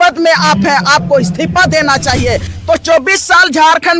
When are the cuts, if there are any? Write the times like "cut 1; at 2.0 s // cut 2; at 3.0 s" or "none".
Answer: cut 1; at 2.5 s